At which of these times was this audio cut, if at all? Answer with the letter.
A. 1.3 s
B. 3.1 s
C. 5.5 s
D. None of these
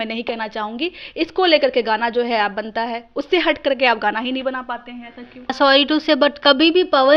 C